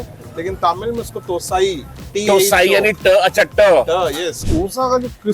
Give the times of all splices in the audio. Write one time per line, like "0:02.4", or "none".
0:04.4